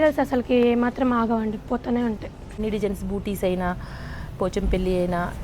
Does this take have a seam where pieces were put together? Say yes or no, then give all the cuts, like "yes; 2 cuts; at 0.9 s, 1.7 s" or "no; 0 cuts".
yes; 1 cut; at 2.5 s